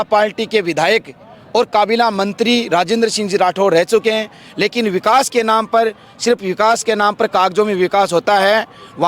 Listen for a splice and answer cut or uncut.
uncut